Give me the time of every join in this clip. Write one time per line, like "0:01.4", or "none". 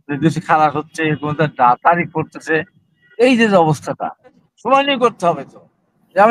0:04.5